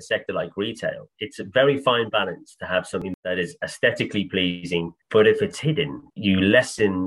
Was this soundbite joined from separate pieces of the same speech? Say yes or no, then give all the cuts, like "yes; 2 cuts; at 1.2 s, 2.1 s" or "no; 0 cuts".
yes; 3 cuts; at 3.0 s, 5.0 s, 6.0 s